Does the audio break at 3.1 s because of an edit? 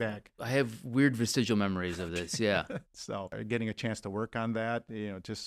yes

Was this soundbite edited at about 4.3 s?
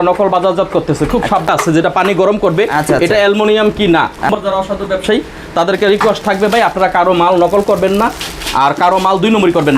yes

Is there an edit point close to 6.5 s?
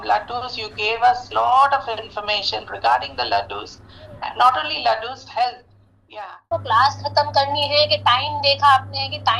yes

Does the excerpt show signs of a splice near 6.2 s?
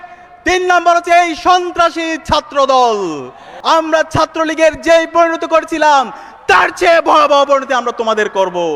no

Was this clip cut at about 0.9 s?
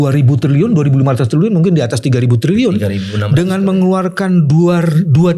no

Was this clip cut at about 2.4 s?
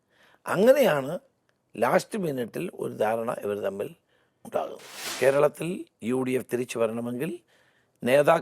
no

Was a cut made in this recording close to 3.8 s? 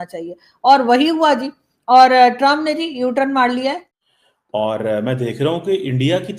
yes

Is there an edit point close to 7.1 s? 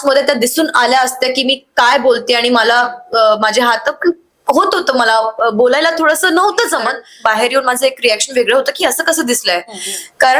yes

